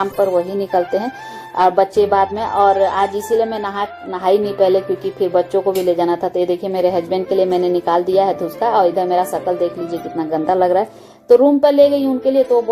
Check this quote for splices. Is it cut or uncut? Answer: uncut